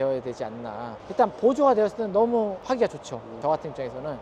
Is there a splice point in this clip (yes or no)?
yes